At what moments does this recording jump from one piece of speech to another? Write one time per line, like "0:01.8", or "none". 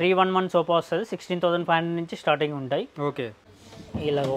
0:03.4